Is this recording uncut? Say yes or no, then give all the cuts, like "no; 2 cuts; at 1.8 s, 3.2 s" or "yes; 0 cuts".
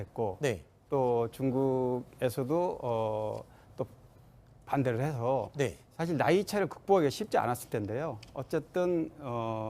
no; 1 cut; at 7.2 s